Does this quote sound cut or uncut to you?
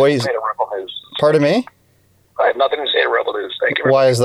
uncut